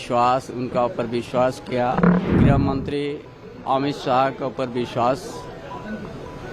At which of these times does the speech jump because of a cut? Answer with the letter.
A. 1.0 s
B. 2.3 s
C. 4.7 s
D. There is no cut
B